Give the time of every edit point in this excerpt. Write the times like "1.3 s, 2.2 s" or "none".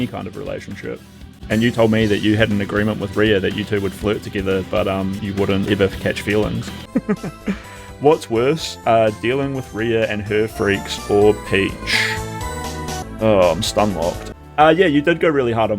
1.3 s, 5.7 s, 6.8 s, 13.1 s, 14.2 s